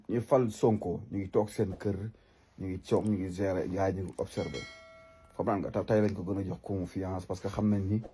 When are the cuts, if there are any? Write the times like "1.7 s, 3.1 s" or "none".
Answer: none